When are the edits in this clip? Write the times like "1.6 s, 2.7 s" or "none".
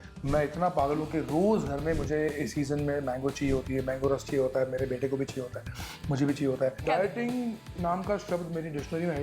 6.8 s